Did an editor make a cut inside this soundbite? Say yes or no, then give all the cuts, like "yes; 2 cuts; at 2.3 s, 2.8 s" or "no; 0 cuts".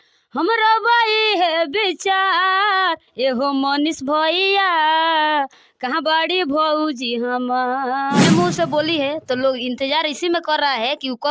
yes; 1 cut; at 8.2 s